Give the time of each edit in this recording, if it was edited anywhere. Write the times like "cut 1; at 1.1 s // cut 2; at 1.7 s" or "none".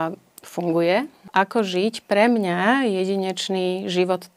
cut 1; at 1.2 s